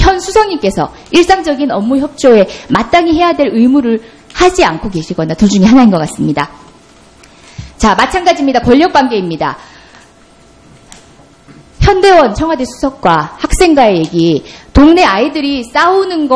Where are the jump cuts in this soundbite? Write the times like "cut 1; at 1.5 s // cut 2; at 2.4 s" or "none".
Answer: none